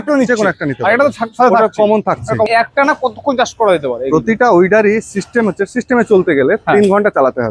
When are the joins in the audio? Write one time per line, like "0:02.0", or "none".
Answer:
0:02.5